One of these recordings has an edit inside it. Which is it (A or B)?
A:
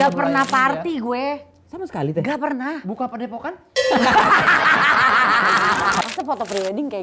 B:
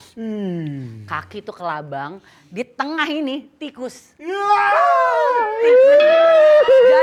A